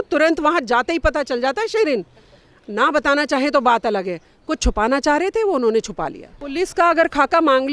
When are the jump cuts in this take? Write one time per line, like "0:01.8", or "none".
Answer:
0:06.5